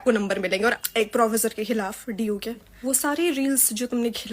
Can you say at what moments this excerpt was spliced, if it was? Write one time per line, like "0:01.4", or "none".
0:00.8
0:02.7